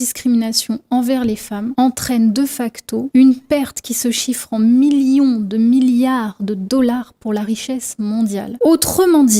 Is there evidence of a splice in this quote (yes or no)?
no